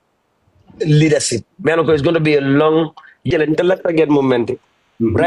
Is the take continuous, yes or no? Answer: no